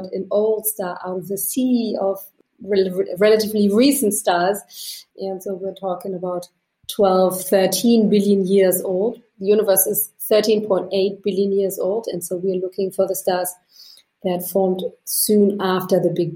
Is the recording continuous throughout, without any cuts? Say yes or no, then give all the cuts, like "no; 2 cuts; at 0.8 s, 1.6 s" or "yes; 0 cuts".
no; 1 cut; at 4.8 s